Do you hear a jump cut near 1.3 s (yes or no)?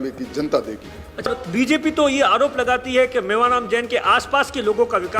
yes